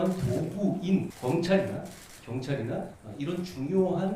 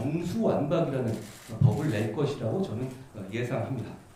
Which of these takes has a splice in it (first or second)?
first